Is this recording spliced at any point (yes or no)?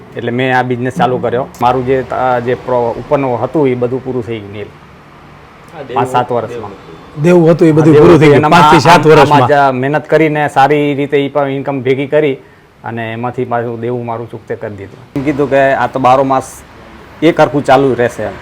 yes